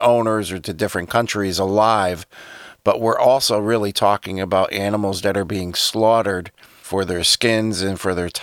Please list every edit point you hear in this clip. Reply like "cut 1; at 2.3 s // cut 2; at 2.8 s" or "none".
none